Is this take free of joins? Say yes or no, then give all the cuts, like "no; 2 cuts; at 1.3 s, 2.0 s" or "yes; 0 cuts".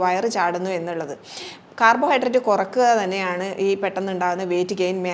yes; 0 cuts